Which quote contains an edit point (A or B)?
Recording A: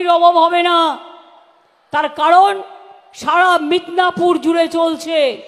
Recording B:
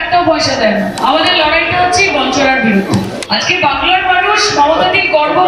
B